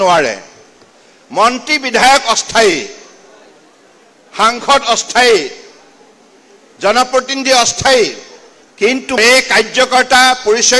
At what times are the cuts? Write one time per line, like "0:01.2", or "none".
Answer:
0:09.2